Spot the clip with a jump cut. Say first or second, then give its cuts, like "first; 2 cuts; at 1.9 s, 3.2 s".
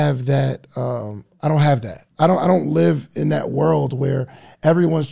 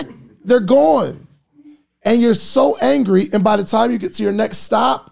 first; 1 cut; at 2.1 s